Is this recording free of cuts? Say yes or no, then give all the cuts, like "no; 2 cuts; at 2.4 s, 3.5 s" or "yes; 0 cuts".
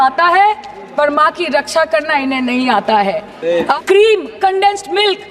no; 1 cut; at 3.7 s